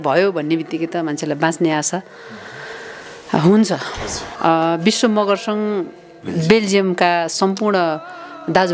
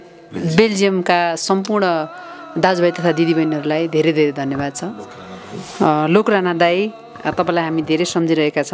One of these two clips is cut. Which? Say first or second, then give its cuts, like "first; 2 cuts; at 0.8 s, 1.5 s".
first; 1 cut; at 4.2 s